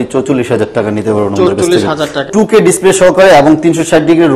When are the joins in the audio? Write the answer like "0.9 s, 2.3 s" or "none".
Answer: 2.3 s